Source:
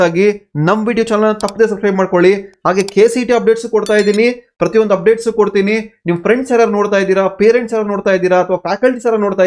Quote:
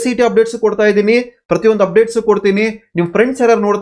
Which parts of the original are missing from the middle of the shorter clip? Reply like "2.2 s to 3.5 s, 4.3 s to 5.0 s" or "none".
none